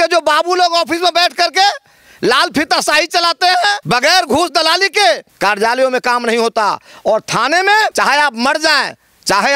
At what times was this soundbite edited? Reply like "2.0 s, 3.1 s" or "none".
3.8 s, 5.3 s, 7.9 s